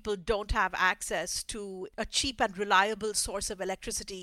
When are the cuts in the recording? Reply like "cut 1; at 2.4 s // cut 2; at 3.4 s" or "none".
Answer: cut 1; at 1.9 s